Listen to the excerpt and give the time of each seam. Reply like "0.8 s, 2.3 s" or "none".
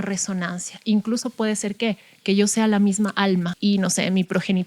3.5 s